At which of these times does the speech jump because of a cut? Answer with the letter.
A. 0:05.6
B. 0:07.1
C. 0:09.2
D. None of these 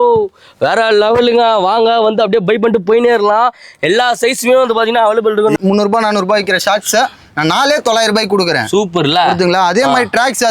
A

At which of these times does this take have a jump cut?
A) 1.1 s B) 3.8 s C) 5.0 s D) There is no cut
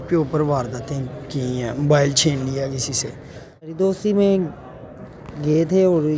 B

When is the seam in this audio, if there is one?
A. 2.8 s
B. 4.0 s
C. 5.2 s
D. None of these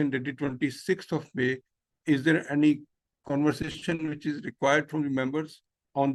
D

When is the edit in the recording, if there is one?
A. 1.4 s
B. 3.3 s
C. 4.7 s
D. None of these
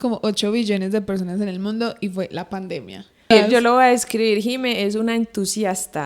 B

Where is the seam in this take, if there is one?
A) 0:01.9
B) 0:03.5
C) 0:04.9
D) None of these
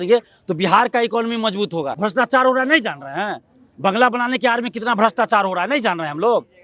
A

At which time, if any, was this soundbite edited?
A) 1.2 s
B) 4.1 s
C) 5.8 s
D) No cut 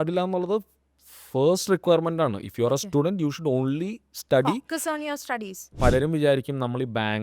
C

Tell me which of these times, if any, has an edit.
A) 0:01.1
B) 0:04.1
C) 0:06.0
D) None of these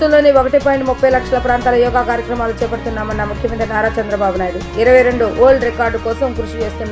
D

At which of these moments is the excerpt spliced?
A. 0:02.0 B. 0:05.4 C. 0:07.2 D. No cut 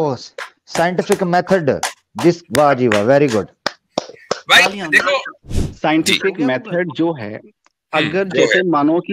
B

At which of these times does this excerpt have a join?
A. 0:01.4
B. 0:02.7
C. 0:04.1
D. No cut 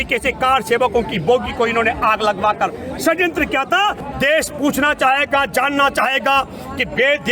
C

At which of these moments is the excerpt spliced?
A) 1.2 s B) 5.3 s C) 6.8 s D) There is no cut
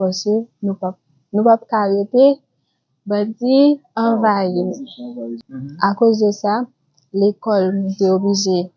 B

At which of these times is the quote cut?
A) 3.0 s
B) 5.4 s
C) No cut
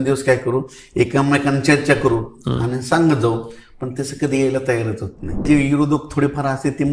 B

